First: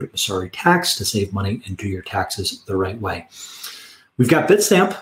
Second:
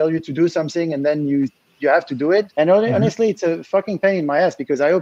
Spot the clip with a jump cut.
second; 1 cut; at 2.5 s

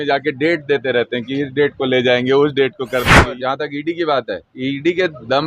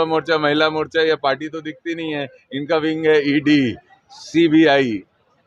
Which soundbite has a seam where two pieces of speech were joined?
first; 2 cuts; at 3.4 s, 4.4 s

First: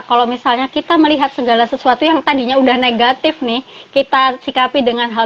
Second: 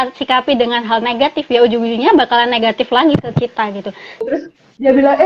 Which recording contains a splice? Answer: second; 1 cut; at 4.2 s

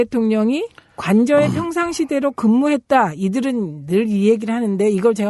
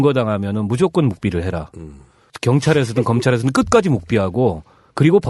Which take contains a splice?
second; 1 cut; at 1.9 s

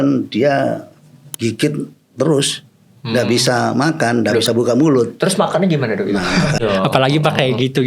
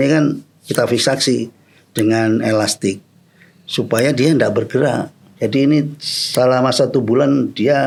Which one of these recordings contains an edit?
first; 1 cut; at 6.6 s

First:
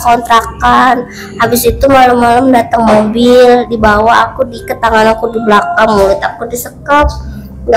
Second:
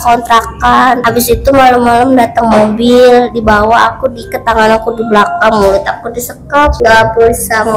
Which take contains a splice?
second; 2 cuts; at 1.0 s, 6.7 s

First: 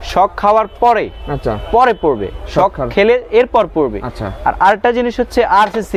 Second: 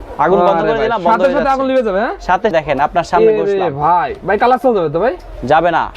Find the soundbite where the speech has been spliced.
second; 1 cut; at 2.5 s

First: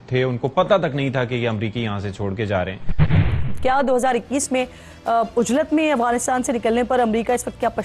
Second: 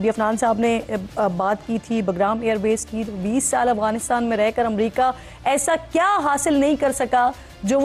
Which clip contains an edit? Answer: first; 1 cut; at 3.2 s

